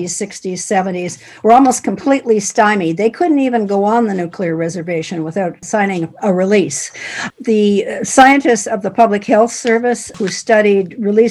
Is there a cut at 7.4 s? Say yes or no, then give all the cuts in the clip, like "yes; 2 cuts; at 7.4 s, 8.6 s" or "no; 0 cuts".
no; 0 cuts